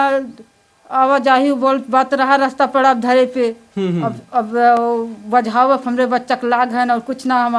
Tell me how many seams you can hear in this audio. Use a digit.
0